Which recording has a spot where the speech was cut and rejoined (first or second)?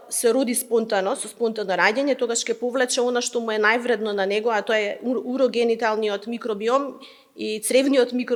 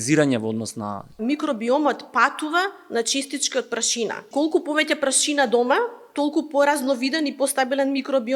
second